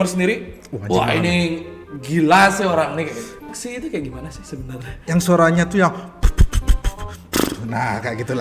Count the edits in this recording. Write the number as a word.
one